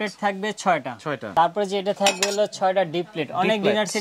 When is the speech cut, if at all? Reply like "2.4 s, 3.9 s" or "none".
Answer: 1.3 s

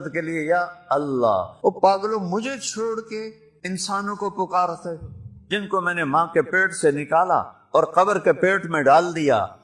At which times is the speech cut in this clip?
1.5 s, 3.5 s

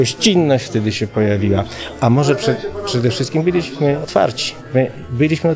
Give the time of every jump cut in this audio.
4.0 s

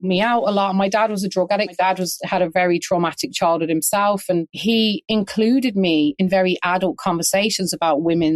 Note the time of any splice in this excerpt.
1.8 s, 4.5 s

